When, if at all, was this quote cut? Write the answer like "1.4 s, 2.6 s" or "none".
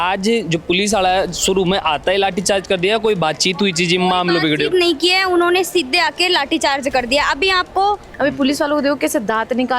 8.1 s